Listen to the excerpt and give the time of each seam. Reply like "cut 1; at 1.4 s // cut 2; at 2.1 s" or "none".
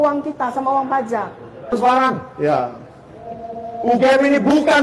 cut 1; at 1.6 s